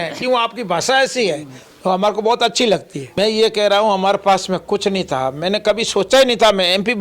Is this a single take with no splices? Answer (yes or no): no